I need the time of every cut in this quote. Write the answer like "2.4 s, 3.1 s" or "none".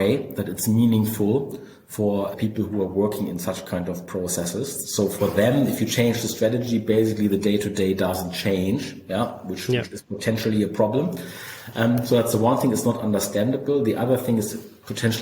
2.3 s